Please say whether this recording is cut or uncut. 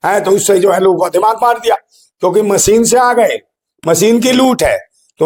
uncut